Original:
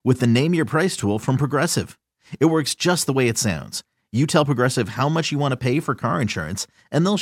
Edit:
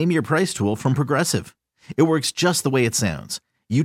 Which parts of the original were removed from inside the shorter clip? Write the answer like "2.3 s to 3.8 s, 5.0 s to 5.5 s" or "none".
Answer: none